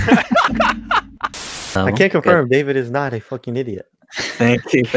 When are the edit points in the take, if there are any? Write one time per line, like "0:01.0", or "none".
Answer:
0:01.8